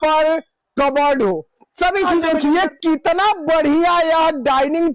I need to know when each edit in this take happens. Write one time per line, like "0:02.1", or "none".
0:02.2